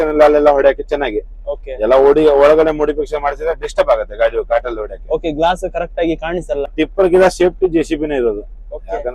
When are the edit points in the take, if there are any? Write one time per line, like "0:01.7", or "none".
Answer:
0:06.7